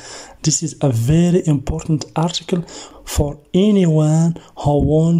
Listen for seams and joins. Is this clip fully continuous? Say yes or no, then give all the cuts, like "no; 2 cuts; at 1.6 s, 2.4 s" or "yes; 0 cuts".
no; 1 cut; at 2.9 s